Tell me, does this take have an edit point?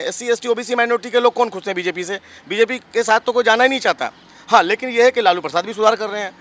no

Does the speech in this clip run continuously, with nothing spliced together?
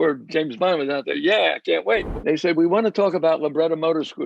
no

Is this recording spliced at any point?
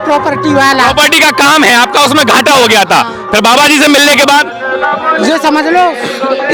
no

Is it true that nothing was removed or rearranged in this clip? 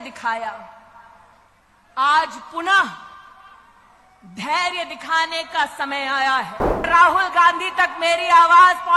no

